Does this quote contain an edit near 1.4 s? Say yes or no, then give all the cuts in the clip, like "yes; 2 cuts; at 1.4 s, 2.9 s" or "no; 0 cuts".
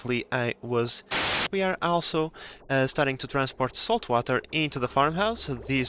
yes; 1 cut; at 1.4 s